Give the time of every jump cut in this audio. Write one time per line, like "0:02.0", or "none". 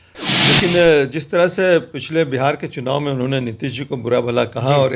none

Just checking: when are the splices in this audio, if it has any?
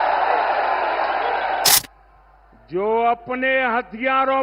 0:01.7

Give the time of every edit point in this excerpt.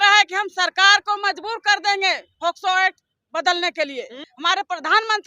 0:04.3

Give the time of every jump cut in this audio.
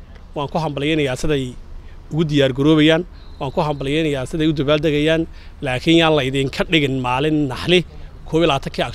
none

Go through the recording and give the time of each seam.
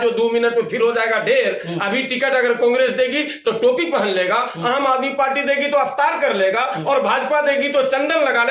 none

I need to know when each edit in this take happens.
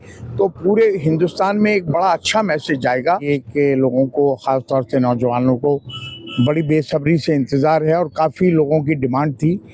0:03.3

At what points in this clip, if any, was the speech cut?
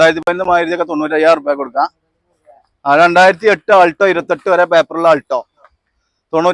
none

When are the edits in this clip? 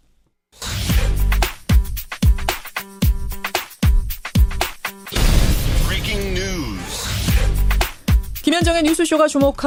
none

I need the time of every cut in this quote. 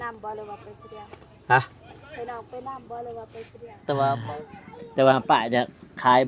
0:04.2

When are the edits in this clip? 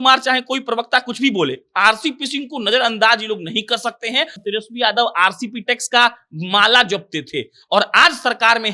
0:04.4

